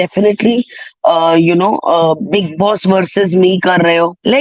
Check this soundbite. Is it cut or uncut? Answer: uncut